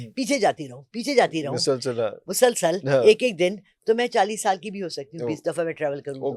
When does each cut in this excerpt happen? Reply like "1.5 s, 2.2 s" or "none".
none